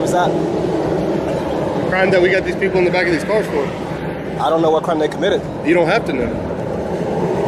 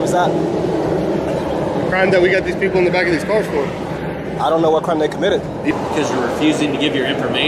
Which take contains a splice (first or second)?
second